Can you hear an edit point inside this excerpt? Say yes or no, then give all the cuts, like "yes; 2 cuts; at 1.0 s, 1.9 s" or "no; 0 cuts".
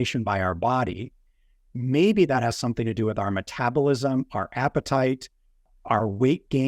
yes; 1 cut; at 5.6 s